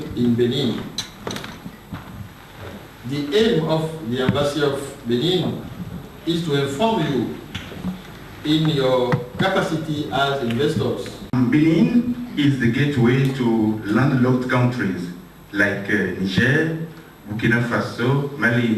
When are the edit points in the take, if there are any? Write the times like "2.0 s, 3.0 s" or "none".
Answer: 11.3 s